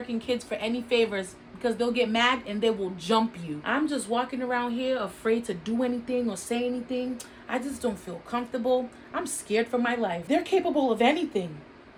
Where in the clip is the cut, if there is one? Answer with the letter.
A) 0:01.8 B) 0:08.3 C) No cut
C